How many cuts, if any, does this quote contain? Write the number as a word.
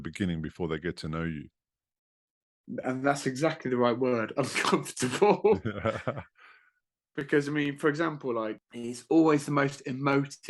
one